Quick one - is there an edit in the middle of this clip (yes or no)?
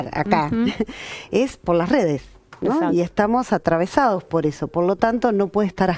no